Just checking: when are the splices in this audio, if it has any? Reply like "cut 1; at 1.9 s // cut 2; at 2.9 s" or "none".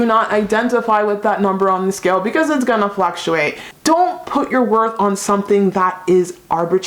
cut 1; at 3.6 s